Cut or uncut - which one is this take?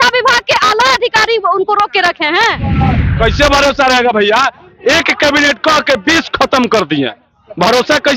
cut